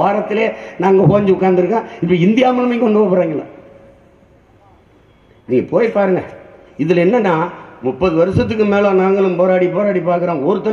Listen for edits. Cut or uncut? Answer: uncut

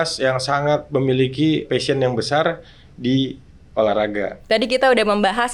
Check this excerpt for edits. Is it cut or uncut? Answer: cut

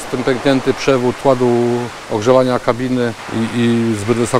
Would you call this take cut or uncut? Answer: cut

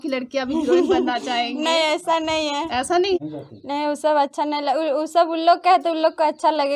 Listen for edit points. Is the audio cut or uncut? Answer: cut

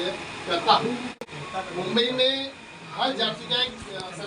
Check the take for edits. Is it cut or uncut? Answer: cut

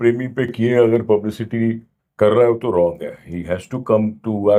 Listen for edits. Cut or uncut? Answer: uncut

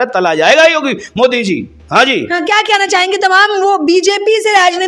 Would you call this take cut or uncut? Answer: uncut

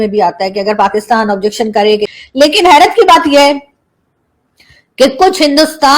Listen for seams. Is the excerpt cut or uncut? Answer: cut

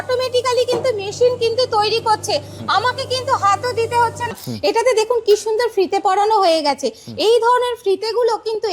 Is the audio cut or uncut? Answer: cut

